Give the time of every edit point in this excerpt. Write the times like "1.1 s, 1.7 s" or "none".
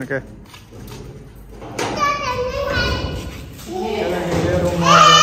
none